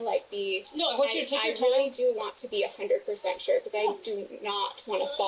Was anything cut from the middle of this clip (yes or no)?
no